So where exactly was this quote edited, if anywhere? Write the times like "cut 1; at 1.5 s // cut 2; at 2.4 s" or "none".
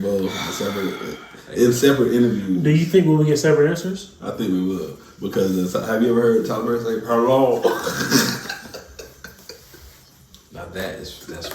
none